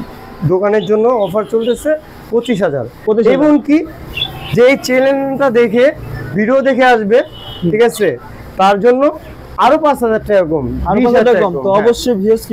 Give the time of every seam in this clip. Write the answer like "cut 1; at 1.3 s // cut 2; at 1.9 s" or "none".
none